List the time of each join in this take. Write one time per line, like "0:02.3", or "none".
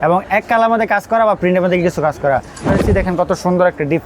0:02.8